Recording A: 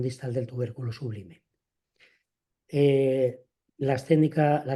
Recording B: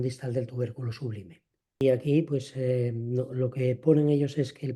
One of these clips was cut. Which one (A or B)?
B